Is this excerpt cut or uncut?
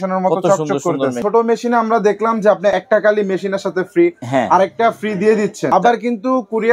cut